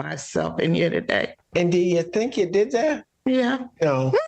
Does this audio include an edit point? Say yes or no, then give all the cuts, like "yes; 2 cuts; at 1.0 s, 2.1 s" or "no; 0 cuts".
yes; 1 cut; at 1.4 s